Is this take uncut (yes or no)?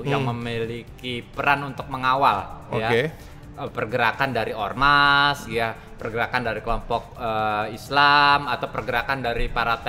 yes